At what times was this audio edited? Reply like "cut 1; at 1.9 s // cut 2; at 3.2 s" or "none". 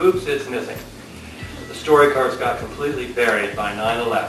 none